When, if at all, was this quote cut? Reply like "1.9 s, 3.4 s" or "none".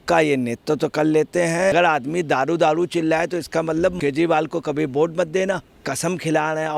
1.7 s, 5.9 s